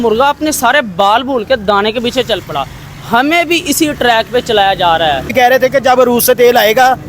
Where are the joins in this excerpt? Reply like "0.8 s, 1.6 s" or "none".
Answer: 5.3 s